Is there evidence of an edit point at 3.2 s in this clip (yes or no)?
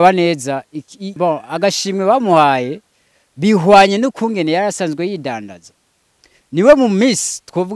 no